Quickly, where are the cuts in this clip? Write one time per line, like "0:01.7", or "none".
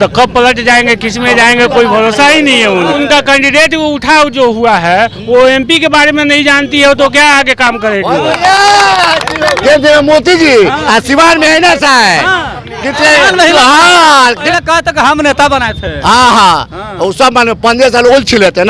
0:02.9
0:09.6
0:14.4

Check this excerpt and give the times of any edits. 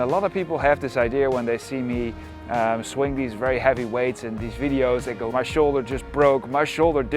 0:05.3

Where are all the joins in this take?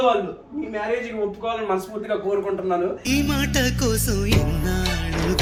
none

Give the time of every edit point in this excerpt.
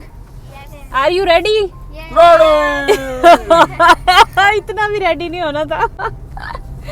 none

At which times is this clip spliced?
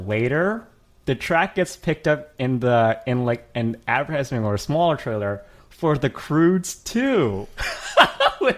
none

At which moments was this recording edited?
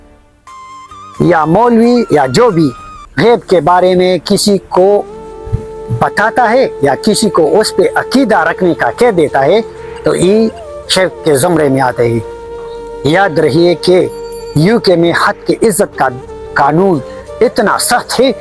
0:12.6

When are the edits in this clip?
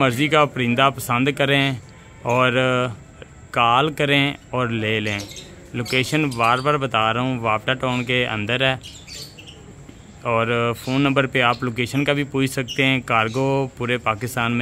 none

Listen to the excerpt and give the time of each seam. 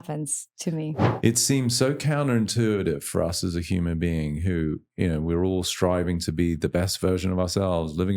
0:01.0

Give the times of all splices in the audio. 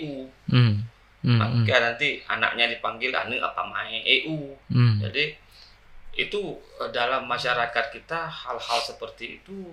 none

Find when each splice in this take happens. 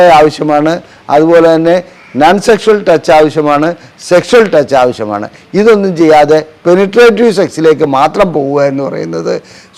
none

